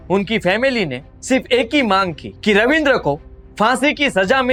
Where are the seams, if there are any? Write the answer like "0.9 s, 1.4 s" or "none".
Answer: none